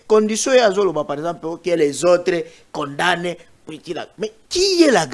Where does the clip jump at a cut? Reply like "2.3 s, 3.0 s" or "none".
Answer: none